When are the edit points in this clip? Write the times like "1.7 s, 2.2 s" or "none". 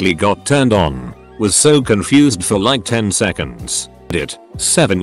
4.1 s